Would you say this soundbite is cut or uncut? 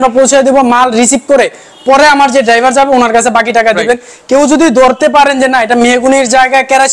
uncut